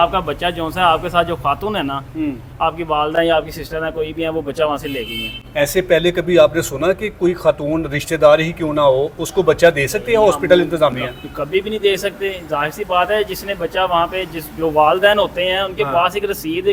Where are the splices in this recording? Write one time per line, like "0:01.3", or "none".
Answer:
none